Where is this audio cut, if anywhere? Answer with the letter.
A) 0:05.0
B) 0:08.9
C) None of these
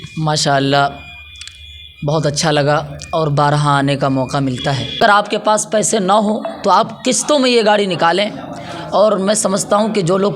A